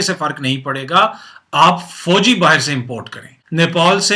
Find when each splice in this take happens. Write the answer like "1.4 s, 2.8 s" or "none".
none